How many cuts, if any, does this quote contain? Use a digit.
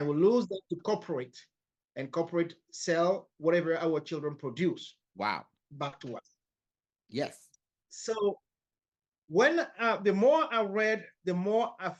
0